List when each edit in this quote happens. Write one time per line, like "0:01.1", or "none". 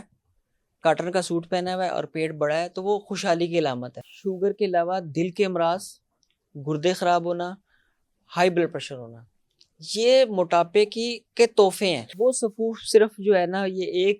0:03.9
0:12.1